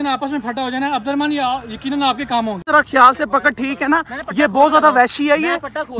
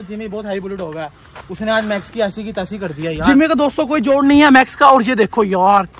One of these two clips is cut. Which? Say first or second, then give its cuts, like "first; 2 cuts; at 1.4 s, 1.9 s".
first; 1 cut; at 2.7 s